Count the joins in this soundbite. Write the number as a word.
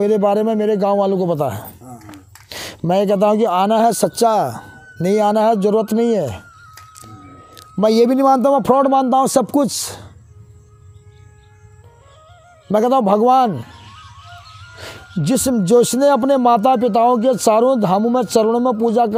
zero